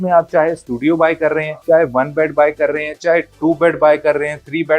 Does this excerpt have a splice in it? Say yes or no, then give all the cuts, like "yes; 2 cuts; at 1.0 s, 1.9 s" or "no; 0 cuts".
yes; 1 cut; at 1.5 s